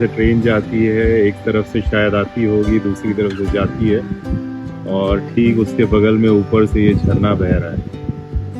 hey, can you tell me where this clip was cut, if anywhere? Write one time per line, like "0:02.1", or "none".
none